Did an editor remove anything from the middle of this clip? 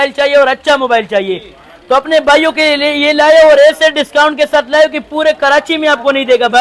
no; 0 cuts

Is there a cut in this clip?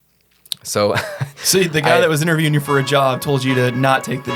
no; 0 cuts

